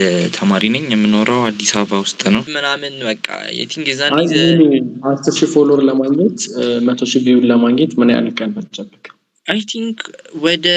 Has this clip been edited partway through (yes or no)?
yes